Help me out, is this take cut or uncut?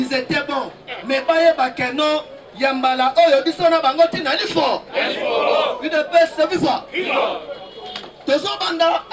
uncut